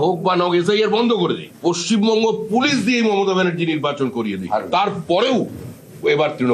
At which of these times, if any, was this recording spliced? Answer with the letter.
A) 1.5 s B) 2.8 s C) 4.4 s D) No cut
A